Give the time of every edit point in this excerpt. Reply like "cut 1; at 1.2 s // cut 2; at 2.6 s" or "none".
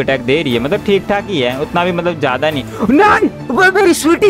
none